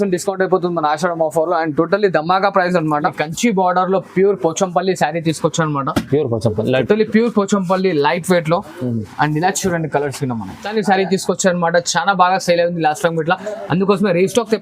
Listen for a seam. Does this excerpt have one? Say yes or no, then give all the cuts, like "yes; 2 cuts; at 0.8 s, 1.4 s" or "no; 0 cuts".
yes; 2 cuts; at 3.2 s, 10.7 s